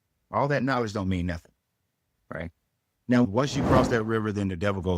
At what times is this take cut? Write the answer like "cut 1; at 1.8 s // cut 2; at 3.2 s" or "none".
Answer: cut 1; at 3.2 s

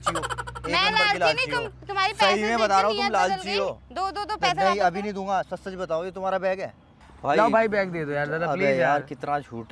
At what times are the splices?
cut 1; at 7.1 s

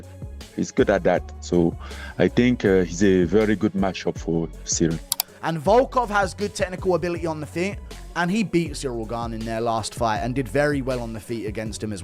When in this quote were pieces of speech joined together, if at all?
cut 1; at 5.2 s

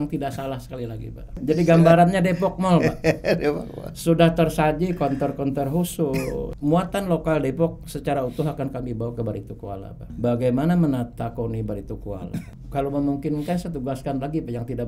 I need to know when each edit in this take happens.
cut 1; at 1.4 s // cut 2; at 6.5 s // cut 3; at 10.1 s // cut 4; at 12.6 s

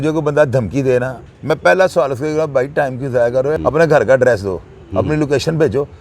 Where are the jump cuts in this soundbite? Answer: cut 1; at 1.2 s // cut 2; at 3.6 s

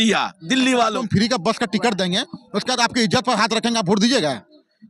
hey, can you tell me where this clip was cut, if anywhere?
cut 1; at 1.0 s

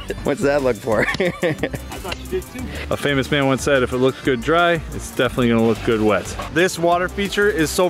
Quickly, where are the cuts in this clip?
cut 1; at 2.7 s // cut 2; at 6.4 s

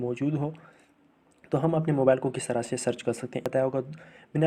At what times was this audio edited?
cut 1; at 3.5 s

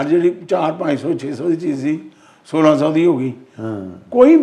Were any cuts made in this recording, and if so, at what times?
none

